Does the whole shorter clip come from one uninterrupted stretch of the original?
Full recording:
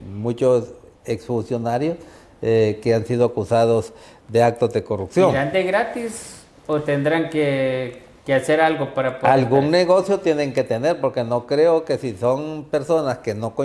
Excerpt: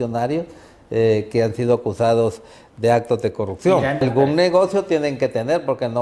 no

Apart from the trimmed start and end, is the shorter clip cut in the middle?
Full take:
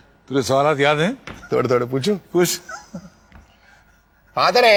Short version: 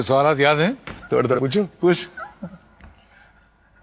yes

